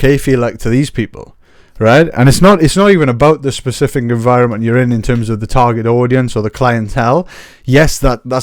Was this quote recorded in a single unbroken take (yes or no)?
yes